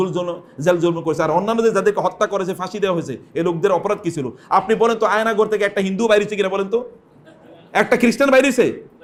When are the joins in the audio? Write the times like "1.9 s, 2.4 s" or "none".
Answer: none